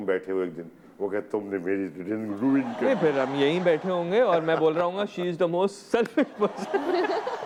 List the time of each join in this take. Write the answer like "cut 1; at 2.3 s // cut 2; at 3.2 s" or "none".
none